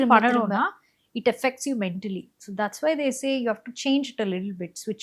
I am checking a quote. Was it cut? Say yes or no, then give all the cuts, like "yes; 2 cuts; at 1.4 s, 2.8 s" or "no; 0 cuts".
no; 0 cuts